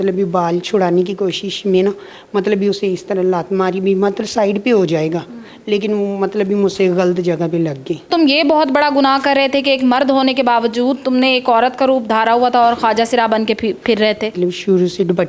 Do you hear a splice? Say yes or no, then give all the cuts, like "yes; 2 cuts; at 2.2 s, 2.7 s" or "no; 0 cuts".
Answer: yes; 2 cuts; at 8.1 s, 14.4 s